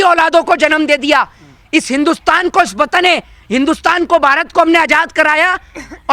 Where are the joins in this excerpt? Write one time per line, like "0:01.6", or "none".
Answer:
none

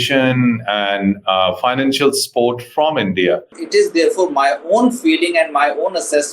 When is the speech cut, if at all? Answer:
0:03.5

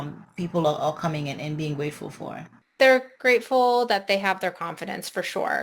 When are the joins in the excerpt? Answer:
0:02.6

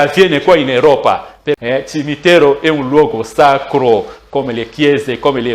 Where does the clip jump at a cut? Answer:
0:01.6

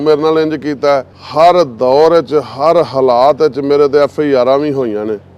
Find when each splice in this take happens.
0:01.2

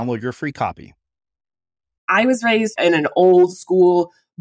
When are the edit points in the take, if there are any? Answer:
0:02.0
0:02.7

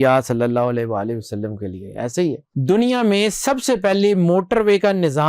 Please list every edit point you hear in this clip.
0:02.5

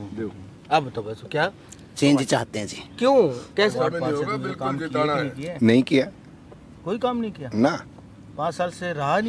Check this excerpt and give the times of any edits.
none

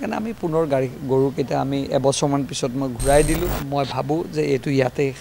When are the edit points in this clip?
0:03.6

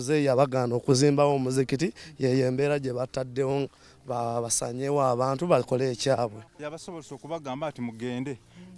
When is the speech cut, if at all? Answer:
0:06.5

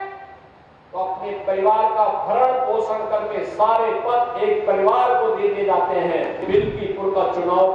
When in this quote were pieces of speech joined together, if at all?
0:06.4

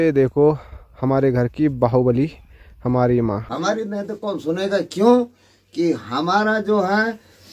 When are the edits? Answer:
0:03.5

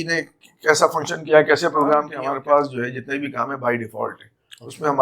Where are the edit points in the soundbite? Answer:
0:02.2

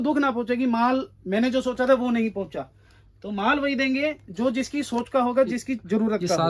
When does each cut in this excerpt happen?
none

